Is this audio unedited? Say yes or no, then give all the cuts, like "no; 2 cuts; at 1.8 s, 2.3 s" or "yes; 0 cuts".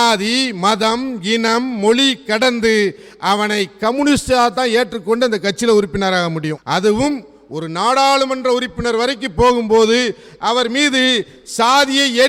yes; 0 cuts